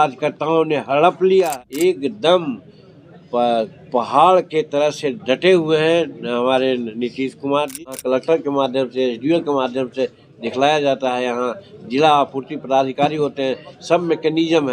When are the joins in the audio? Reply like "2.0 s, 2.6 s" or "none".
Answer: 1.6 s, 7.7 s